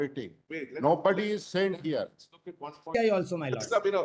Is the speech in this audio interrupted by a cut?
yes; 1 cut; at 2.9 s

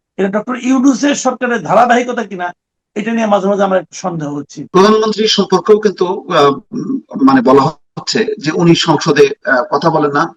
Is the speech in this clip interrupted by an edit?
yes; 1 cut; at 4.7 s

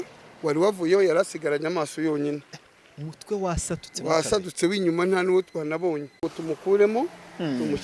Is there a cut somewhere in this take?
no; 0 cuts

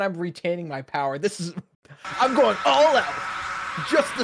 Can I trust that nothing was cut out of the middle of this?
yes; 0 cuts

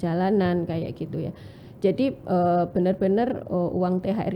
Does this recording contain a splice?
no; 0 cuts

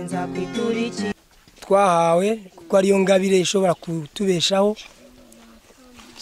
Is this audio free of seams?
no; 1 cut; at 1.1 s

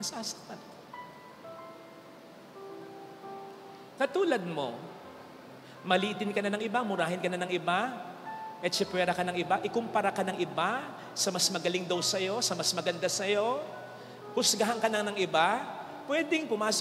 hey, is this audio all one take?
yes; 0 cuts

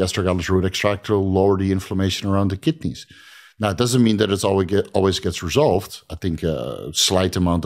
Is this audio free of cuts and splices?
yes; 0 cuts

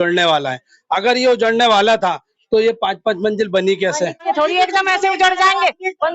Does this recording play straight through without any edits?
no; 1 cut; at 4.2 s

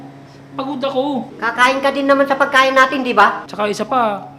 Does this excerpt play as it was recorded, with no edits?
no; 2 cuts; at 1.3 s, 3.5 s

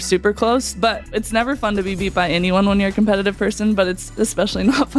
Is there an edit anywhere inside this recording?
yes; 1 cut; at 0.9 s

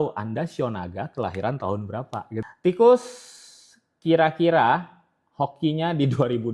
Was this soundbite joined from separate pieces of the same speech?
yes; 1 cut; at 2.4 s

